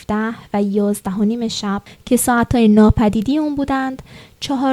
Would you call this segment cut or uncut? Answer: cut